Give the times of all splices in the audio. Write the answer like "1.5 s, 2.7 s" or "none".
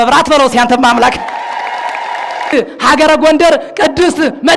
2.5 s